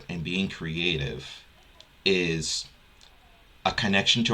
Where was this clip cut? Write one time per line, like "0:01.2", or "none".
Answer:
none